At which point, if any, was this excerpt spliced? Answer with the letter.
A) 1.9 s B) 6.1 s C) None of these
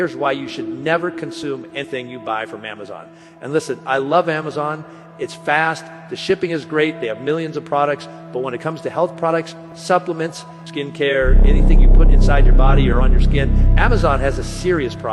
A